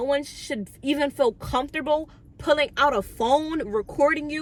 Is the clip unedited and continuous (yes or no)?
yes